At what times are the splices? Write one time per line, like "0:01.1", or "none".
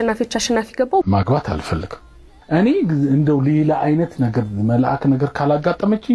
0:01.1